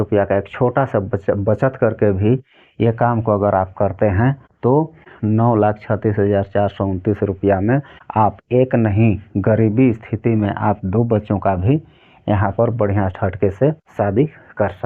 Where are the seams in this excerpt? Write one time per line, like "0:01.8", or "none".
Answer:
0:04.8
0:08.0
0:13.9